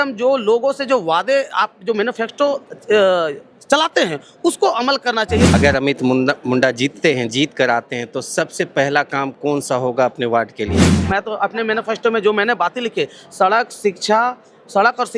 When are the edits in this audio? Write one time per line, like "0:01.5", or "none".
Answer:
0:05.5
0:10.9